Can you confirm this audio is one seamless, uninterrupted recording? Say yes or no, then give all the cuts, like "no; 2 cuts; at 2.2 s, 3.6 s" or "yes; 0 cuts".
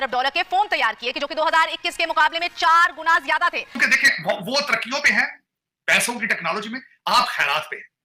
no; 1 cut; at 3.8 s